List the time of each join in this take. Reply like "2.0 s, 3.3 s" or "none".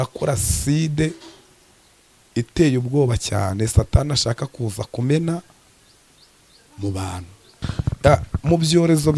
7.6 s